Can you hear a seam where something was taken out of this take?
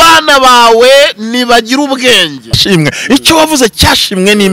yes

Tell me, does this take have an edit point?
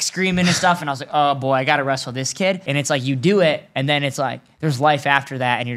yes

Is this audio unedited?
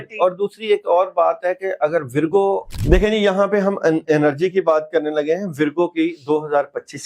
no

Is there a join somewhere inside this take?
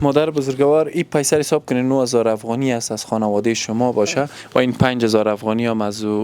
no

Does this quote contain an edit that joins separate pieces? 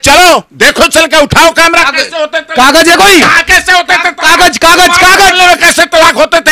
no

